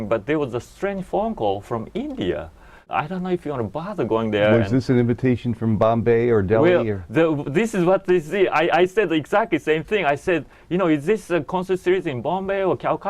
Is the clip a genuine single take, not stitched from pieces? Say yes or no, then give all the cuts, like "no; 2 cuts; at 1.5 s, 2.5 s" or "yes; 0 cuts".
no; 1 cut; at 2.8 s